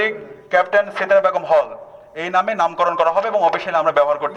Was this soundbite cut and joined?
no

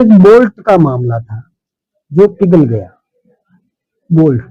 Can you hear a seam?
no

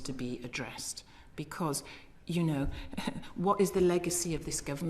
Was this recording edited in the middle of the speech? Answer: no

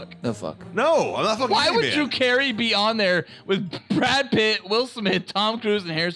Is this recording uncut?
yes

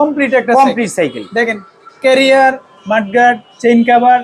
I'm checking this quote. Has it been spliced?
no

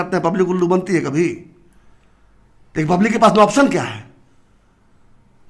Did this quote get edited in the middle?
no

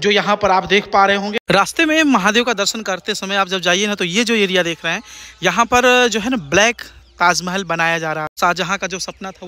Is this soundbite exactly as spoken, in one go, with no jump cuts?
no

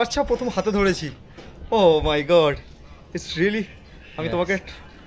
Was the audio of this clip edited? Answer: no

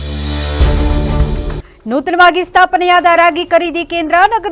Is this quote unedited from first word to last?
yes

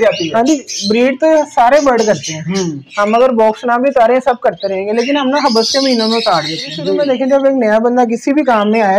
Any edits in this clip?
yes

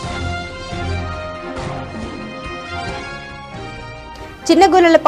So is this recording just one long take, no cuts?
no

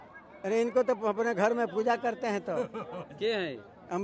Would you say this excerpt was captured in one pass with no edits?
yes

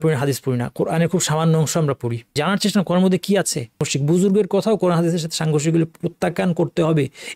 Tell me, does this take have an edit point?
yes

